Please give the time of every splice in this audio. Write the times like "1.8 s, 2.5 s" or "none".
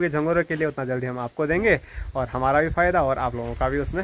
none